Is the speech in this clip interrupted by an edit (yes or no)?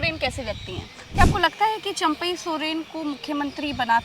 yes